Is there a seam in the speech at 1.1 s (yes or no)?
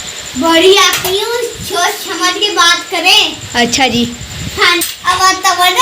no